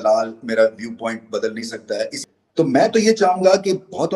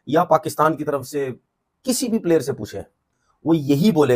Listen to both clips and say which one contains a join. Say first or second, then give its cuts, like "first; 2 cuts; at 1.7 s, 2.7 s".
first; 1 cut; at 2.2 s